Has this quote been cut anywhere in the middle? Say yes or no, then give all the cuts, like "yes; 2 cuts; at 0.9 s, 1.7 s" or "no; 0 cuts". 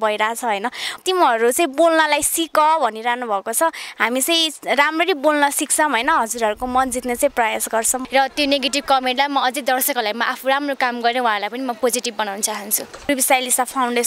yes; 3 cuts; at 0.9 s, 8.0 s, 13.1 s